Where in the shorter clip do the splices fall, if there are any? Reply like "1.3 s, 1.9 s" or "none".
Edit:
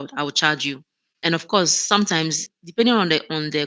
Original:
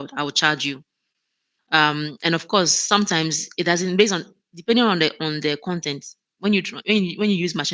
1.1 s, 2.5 s